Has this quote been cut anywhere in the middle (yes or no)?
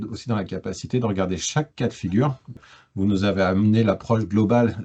yes